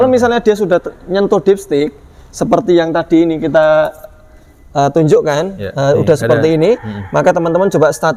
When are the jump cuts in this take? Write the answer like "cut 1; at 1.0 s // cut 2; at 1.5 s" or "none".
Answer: none